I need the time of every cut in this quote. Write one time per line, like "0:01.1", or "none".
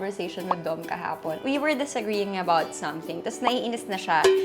0:01.4